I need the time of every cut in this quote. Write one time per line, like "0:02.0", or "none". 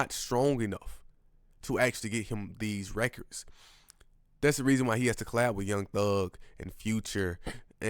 none